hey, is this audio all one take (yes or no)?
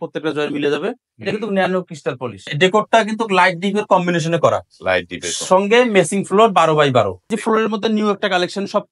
no